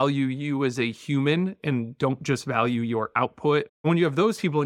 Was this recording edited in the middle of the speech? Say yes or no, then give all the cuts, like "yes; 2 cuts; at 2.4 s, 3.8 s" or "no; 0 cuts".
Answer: yes; 1 cut; at 3.7 s